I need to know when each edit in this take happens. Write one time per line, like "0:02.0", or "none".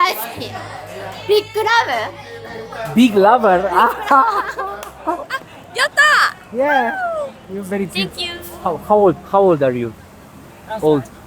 0:05.3